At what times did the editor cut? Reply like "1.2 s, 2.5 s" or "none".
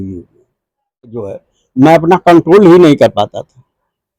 1.2 s